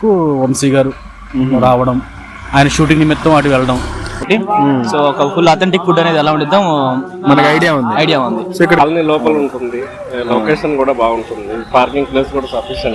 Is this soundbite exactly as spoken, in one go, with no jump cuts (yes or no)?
no